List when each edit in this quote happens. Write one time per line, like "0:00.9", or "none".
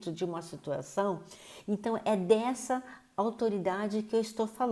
none